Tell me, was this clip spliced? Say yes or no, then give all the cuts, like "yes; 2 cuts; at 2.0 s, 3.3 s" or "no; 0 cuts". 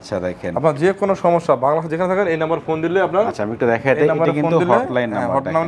no; 0 cuts